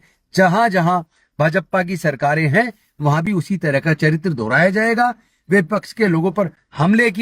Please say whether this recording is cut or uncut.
uncut